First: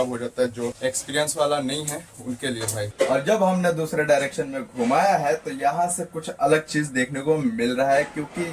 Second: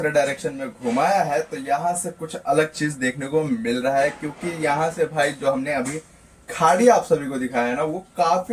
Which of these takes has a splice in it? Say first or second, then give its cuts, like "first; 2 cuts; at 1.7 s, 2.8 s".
first; 2 cuts; at 0.8 s, 2.9 s